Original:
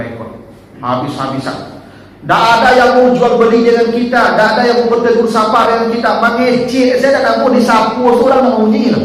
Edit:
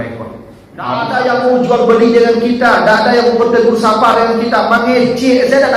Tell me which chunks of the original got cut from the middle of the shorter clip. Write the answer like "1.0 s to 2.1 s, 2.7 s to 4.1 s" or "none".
1.1 s to 2.6 s